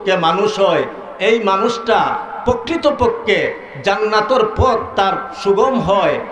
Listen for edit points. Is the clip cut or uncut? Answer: uncut